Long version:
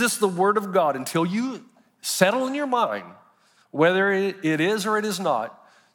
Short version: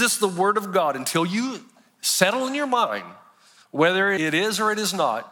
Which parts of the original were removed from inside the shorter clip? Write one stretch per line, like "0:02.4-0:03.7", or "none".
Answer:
0:04.2-0:04.4